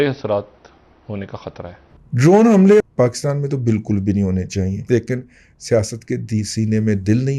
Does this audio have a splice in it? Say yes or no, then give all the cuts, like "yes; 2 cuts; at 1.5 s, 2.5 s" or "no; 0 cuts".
yes; 3 cuts; at 1.9 s, 2.8 s, 4.8 s